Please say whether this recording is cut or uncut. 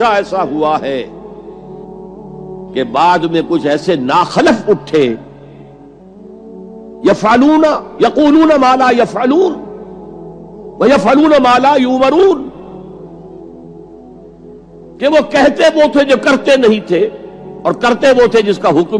uncut